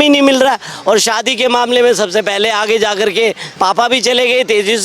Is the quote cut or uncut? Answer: cut